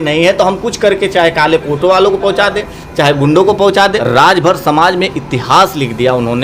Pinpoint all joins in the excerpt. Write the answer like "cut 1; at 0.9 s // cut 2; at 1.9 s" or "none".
cut 1; at 4.0 s

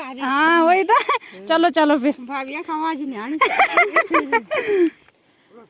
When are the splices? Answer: none

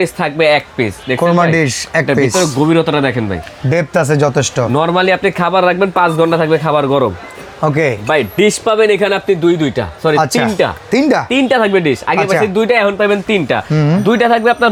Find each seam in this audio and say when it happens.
none

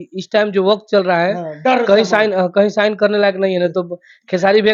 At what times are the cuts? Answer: none

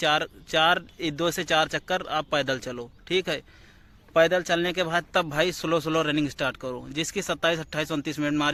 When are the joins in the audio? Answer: none

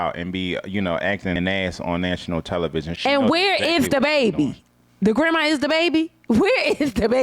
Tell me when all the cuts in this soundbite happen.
cut 1; at 1.3 s // cut 2; at 2.9 s

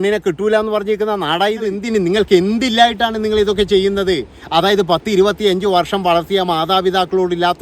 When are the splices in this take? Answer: cut 1; at 1.8 s

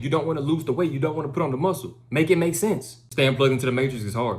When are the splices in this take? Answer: cut 1; at 3.0 s

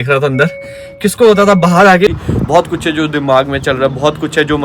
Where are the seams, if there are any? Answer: cut 1; at 2.1 s

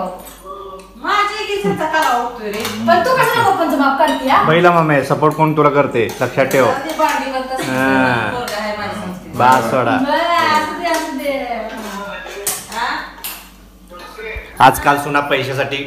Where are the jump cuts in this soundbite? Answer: none

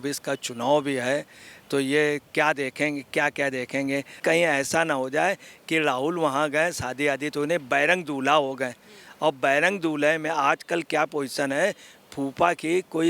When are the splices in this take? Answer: cut 1; at 4.2 s

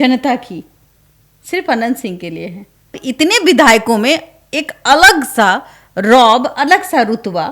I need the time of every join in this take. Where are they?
cut 1; at 3.0 s

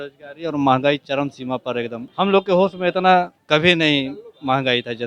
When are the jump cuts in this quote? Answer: cut 1; at 2.0 s // cut 2; at 3.4 s

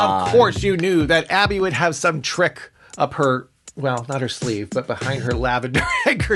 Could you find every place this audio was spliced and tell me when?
none

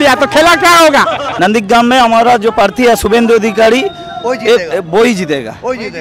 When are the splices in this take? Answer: cut 1; at 1.2 s

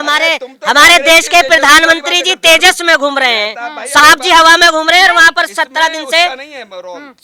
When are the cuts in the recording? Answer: none

